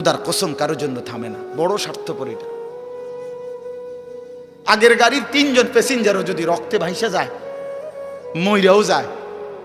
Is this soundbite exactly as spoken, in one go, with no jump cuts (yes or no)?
no